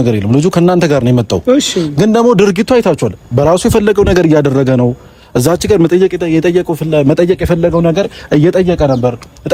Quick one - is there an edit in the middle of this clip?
no; 0 cuts

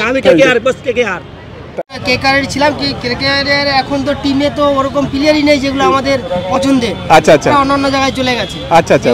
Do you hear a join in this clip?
yes; 1 cut; at 1.9 s

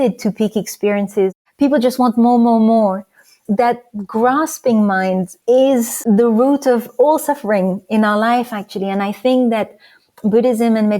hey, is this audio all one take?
no; 4 cuts; at 1.3 s, 3.3 s, 5.3 s, 5.9 s

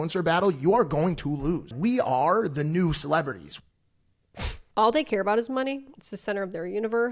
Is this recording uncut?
no; 2 cuts; at 1.7 s, 4.6 s

